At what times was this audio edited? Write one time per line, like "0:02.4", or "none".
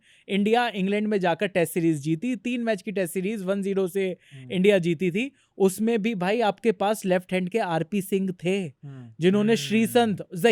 none